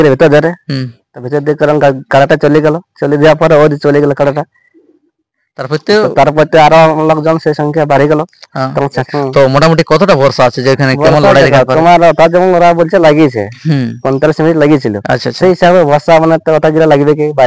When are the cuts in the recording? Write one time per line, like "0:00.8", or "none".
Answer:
0:09.0